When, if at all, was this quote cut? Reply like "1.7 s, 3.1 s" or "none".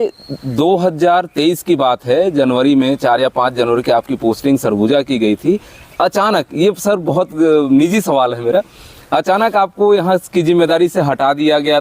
none

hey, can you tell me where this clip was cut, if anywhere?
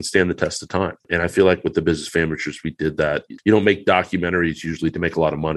1.0 s, 3.3 s

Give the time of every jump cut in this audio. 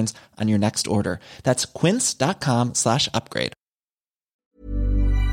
4.3 s

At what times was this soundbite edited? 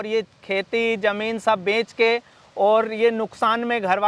none

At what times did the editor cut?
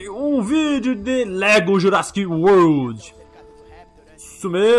none

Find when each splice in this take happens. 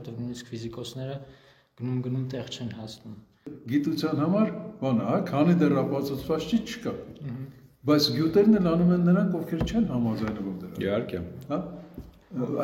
3.5 s

